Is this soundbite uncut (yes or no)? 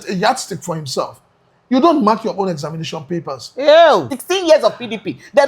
no